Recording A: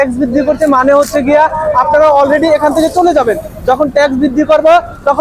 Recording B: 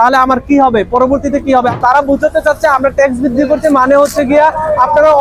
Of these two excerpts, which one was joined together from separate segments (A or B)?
B